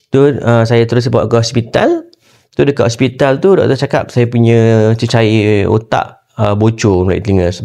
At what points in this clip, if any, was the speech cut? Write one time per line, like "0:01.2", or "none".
none